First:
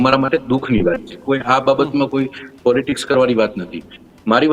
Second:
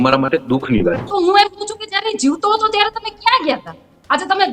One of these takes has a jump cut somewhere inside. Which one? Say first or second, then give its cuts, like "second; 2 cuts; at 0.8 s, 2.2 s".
second; 1 cut; at 1.0 s